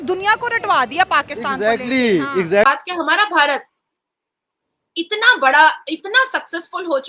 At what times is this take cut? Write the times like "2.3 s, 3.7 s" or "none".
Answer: 2.6 s